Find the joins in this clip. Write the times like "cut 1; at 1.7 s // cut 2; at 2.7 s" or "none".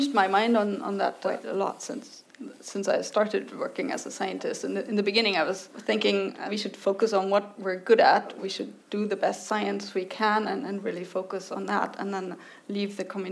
cut 1; at 1.2 s // cut 2; at 5.7 s // cut 3; at 6.4 s // cut 4; at 8.4 s